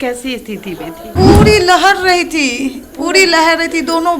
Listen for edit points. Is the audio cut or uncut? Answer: cut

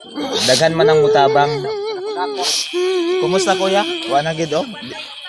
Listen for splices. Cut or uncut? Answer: cut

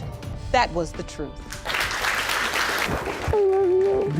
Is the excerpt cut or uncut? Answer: cut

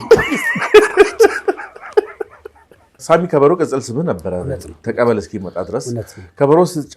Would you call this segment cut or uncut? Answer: cut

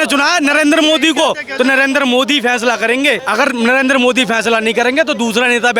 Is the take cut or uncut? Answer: cut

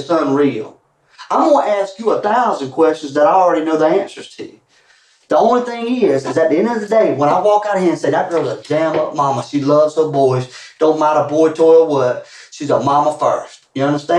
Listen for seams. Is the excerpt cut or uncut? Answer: uncut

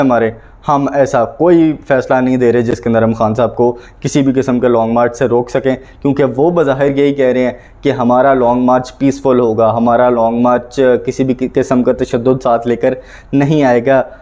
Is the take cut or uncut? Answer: uncut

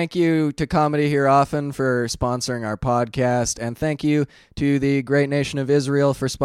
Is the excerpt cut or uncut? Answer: uncut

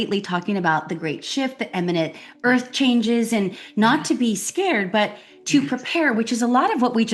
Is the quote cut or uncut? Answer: uncut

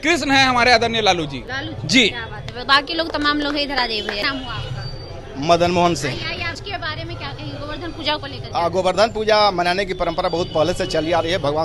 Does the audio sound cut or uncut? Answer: uncut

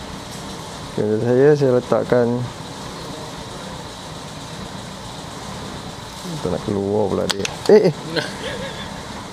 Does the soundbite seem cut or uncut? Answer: cut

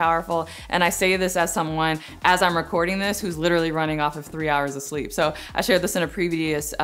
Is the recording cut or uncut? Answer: uncut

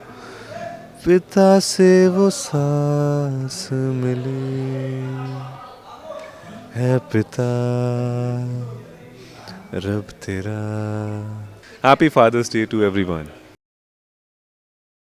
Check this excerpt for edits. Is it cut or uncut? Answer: uncut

